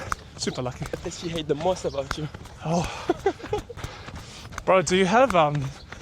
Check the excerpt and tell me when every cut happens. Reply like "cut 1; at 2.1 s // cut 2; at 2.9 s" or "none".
cut 1; at 1.0 s // cut 2; at 3.8 s